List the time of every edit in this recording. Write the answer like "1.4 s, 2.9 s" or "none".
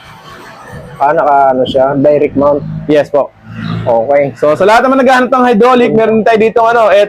none